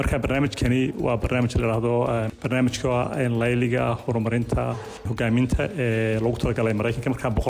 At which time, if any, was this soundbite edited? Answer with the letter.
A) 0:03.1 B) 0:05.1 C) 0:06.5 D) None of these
B